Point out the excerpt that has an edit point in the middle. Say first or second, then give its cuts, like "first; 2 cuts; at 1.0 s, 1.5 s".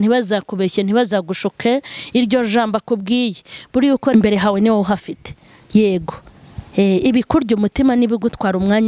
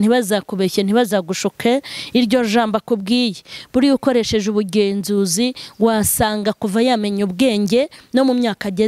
first; 1 cut; at 4.1 s